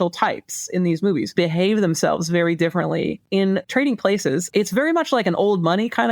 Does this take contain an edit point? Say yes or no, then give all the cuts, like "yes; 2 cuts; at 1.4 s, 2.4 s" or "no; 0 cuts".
yes; 3 cuts; at 1.3 s, 3.4 s, 4.5 s